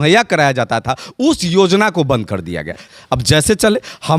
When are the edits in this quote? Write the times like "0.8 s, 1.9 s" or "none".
2.8 s